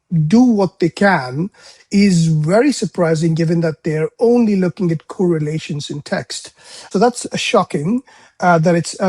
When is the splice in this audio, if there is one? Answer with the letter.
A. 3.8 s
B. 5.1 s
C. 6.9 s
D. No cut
C